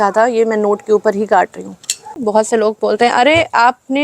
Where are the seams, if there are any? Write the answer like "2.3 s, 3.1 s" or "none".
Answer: 2.2 s